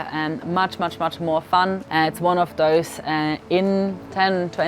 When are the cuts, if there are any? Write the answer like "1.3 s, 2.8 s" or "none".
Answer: 1.9 s

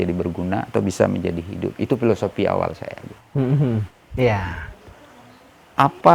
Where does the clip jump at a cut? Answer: 4.1 s

